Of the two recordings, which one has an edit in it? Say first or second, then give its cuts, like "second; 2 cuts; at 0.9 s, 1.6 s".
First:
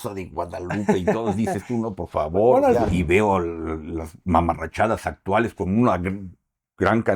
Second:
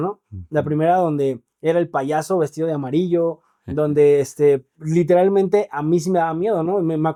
first; 1 cut; at 2.8 s